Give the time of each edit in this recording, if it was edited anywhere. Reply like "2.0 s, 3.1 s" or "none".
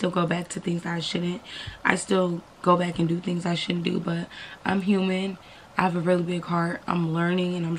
none